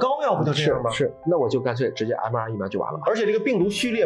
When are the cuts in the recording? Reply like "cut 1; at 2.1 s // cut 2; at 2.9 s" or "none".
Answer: cut 1; at 1.2 s

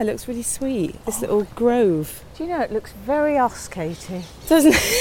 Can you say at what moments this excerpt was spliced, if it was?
none

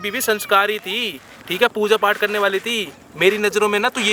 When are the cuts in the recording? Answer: none

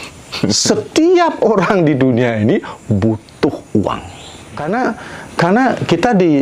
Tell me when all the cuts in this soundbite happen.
cut 1; at 4.6 s

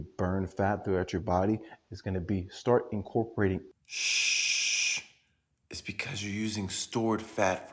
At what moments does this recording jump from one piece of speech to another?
cut 1; at 3.7 s

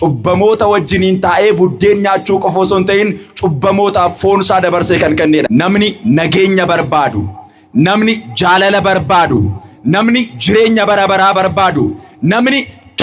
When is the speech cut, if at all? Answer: cut 1; at 5.5 s

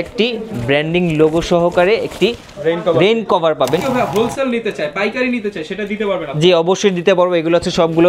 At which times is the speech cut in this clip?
cut 1; at 3.8 s

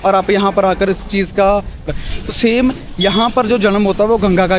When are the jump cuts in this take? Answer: cut 1; at 2.0 s

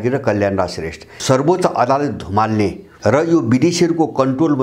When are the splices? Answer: cut 1; at 1.2 s // cut 2; at 2.9 s

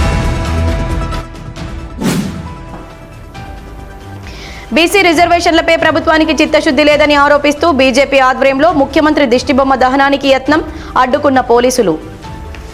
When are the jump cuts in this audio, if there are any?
none

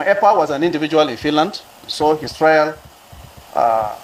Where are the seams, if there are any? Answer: none

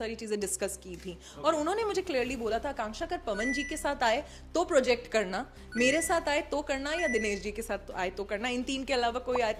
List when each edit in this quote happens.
none

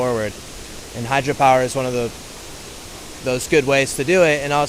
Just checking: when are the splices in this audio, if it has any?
none

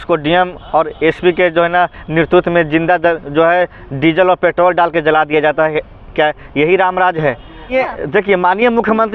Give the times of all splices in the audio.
cut 1; at 7.7 s

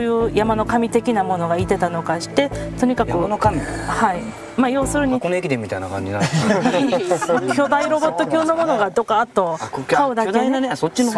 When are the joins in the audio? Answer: none

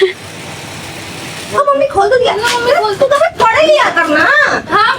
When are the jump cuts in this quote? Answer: cut 1; at 1.6 s

